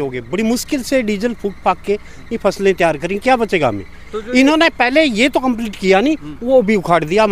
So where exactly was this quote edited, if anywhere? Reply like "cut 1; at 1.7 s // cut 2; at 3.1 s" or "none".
none